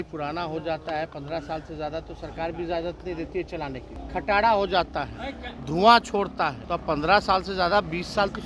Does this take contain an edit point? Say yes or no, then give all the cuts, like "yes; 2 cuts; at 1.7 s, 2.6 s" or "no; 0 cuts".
yes; 2 cuts; at 3.9 s, 6.7 s